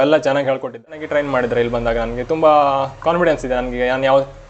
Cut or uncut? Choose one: cut